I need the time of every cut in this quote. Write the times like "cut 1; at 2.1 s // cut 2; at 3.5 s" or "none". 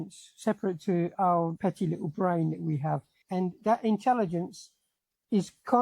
cut 1; at 1.5 s // cut 2; at 3.1 s